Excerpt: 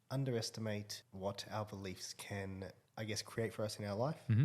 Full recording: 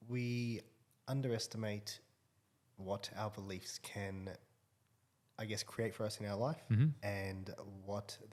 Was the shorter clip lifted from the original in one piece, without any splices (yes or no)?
no